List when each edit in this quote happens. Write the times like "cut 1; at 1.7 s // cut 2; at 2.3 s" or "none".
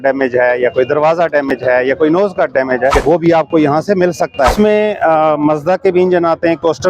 cut 1; at 3.0 s // cut 2; at 4.5 s